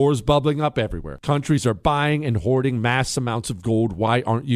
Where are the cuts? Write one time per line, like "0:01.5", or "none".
none